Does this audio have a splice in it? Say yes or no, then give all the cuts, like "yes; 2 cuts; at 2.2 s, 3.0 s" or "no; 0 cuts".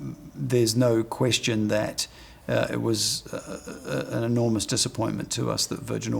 no; 0 cuts